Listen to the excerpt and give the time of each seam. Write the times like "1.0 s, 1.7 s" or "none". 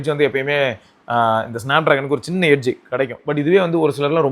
3.3 s